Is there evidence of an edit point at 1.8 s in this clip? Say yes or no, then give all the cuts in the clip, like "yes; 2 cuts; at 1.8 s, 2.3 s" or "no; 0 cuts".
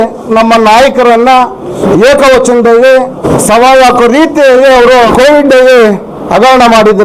yes; 3 cuts; at 1.8 s, 3.2 s, 5.1 s